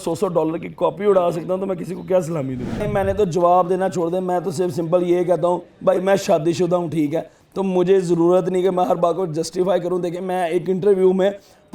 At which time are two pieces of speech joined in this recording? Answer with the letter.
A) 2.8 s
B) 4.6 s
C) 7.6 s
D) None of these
A